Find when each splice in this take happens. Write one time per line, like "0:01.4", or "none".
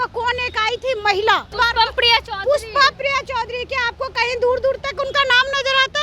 0:01.5